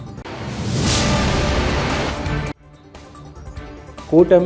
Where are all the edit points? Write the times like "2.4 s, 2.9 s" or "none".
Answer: 2.1 s